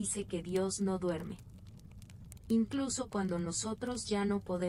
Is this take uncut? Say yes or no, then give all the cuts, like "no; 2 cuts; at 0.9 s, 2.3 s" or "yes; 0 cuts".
yes; 0 cuts